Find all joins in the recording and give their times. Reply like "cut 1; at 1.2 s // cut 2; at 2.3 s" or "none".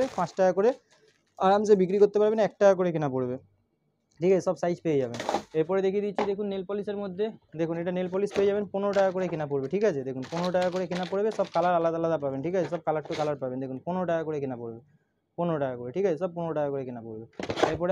none